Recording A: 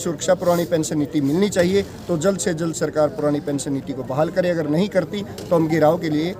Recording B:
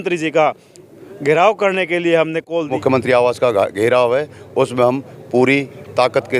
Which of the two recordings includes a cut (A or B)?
B